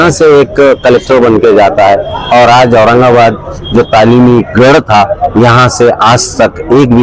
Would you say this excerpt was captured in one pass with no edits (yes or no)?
yes